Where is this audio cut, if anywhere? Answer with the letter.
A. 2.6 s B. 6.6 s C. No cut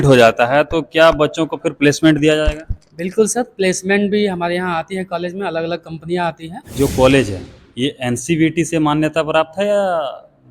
B